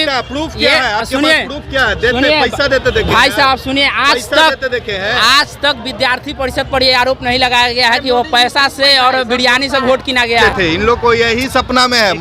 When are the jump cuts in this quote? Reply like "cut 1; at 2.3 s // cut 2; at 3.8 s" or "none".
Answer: cut 1; at 10.4 s